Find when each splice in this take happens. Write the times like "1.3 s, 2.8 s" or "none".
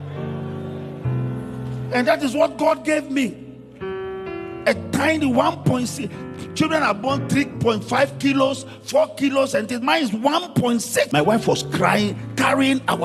11.1 s